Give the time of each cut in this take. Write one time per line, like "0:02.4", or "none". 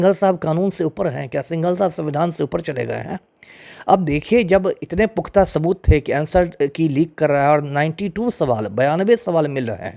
none

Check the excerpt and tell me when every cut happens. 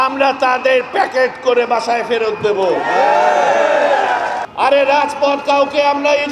0:04.4

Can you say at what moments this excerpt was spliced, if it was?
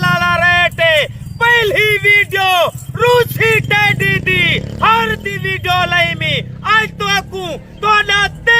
none

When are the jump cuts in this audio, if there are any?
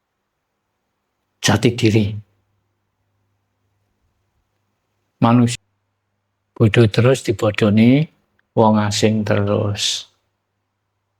0:05.5

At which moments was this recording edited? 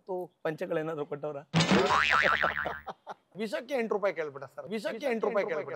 0:03.3

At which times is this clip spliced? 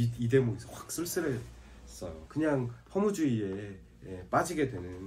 0:02.2

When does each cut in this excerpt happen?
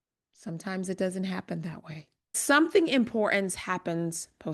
0:02.4

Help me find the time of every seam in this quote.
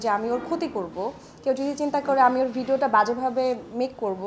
none

